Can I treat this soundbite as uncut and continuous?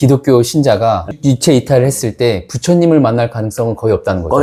yes; 0 cuts

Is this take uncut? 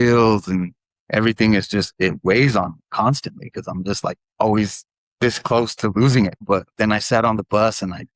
no; 1 cut; at 6.4 s

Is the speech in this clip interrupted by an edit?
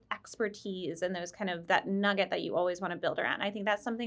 no; 0 cuts

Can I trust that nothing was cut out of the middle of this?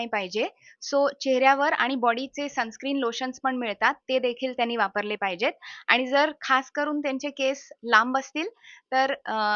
yes; 0 cuts

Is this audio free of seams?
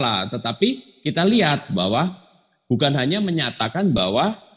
yes; 0 cuts

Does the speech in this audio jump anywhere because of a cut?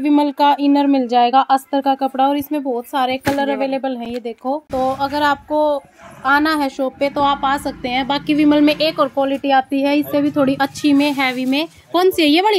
no; 0 cuts

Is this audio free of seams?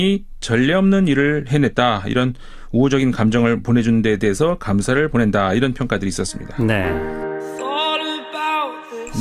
no; 1 cut; at 6.8 s

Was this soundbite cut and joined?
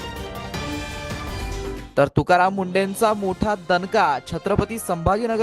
yes; 1 cut; at 1.8 s

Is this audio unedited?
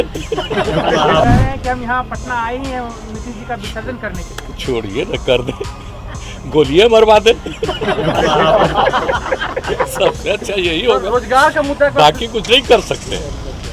no; 1 cut; at 1.2 s

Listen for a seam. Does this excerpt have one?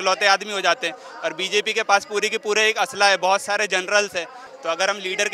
yes; 1 cut; at 4.4 s

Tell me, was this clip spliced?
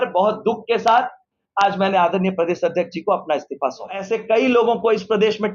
yes; 1 cut; at 4.0 s

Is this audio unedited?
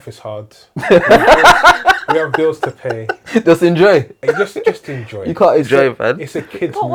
yes; 0 cuts

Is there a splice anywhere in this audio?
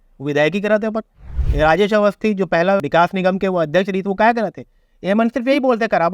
yes; 1 cut; at 2.8 s

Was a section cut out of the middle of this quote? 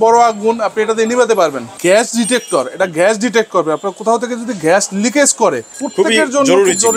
yes; 2 cuts; at 1.7 s, 5.8 s

